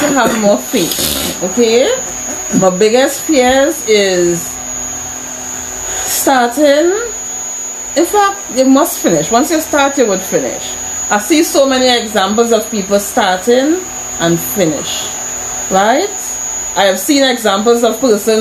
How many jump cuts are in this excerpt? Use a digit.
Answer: 0